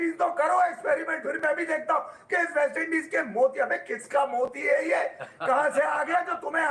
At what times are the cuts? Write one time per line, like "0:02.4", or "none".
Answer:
none